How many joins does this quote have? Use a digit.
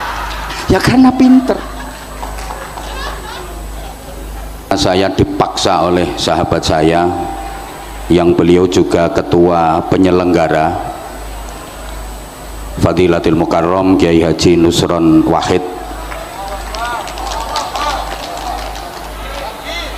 1